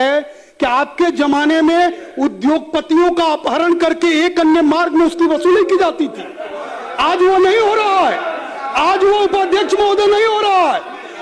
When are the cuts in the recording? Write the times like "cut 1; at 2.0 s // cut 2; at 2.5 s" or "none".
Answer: none